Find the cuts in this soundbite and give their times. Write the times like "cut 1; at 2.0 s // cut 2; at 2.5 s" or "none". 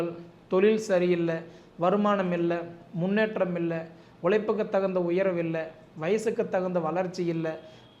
none